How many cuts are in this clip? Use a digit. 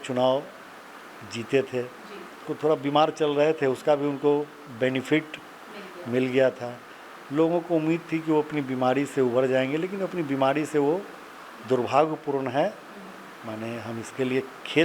1